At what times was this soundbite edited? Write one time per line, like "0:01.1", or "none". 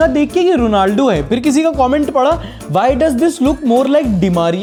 none